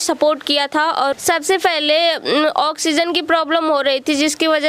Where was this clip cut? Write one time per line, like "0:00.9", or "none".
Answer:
0:01.1

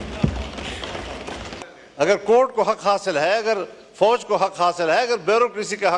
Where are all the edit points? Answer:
0:01.6

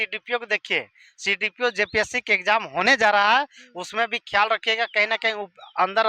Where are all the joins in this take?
none

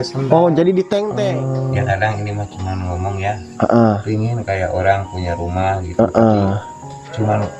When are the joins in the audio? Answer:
0:01.2

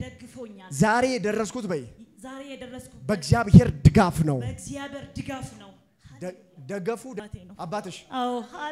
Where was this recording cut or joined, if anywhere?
0:07.2

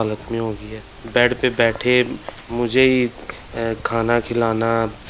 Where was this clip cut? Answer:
0:00.9

